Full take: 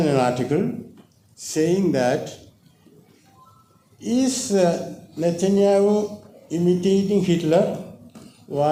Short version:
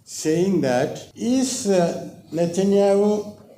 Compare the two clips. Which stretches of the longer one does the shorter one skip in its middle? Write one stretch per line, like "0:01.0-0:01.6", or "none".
0:02.4-0:03.9